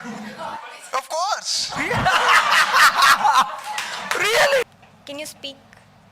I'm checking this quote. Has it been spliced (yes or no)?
yes